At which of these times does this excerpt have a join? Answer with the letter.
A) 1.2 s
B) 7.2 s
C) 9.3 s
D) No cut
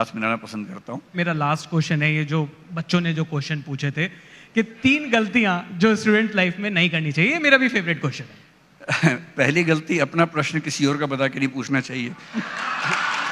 A